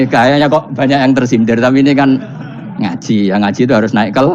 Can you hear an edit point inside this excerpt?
no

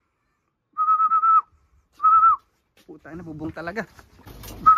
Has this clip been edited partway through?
no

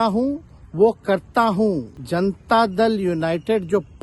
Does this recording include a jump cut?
yes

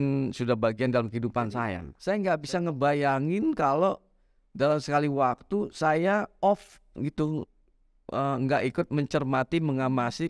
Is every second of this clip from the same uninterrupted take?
no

